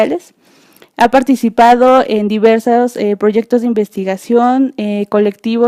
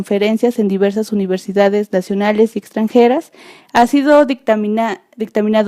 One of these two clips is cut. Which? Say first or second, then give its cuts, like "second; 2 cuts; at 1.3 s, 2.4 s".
second; 1 cut; at 4.7 s